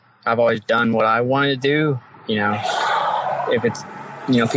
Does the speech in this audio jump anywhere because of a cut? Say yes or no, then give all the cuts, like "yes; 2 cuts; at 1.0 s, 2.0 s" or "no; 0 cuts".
no; 0 cuts